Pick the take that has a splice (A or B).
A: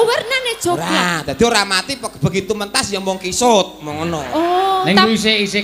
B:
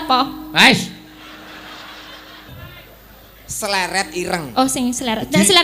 B